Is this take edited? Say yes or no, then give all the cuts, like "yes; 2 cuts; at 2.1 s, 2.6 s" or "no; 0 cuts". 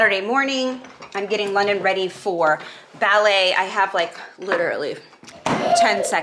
no; 0 cuts